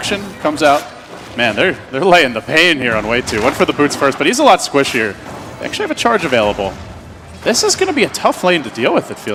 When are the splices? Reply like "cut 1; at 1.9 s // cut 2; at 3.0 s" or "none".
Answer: none